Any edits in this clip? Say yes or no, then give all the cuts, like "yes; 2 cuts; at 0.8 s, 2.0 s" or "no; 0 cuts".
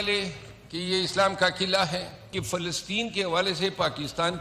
yes; 1 cut; at 2.3 s